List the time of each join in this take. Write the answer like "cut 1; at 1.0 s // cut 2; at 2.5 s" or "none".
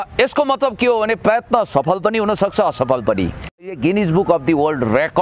cut 1; at 3.7 s